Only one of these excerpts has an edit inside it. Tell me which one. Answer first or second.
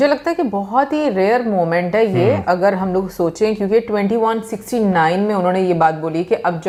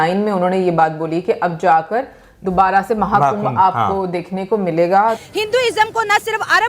second